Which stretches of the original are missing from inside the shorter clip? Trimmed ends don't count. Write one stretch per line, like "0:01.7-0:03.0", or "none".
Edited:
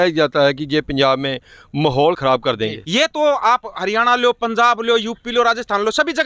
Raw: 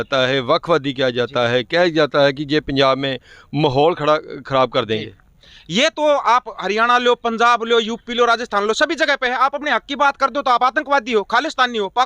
0:04.0-0:05.0